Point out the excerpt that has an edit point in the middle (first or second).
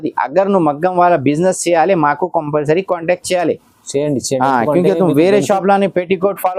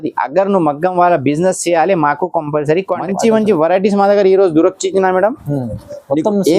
second